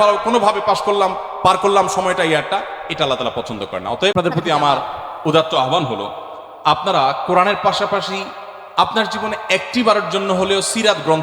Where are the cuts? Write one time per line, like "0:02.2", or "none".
0:04.1